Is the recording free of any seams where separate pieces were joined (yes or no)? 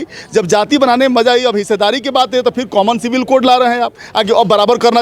yes